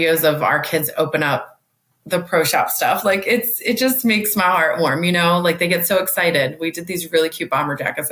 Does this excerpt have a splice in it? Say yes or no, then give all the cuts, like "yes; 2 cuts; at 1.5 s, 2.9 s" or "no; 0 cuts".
no; 0 cuts